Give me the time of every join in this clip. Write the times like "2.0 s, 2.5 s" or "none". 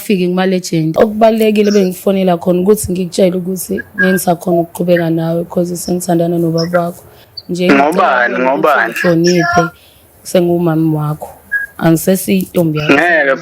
0.9 s